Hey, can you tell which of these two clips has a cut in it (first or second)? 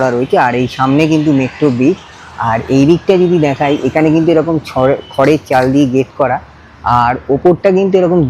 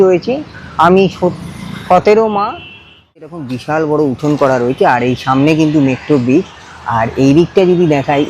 second